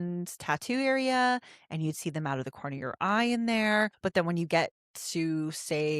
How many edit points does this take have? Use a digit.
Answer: 1